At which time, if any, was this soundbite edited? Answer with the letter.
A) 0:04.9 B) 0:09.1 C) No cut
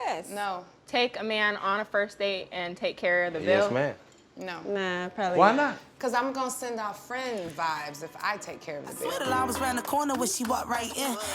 B